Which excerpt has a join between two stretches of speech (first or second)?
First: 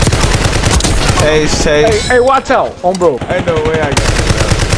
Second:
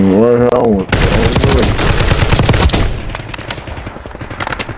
first